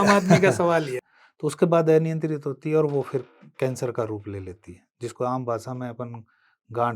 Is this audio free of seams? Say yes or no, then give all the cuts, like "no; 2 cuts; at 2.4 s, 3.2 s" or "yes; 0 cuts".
no; 1 cut; at 1.0 s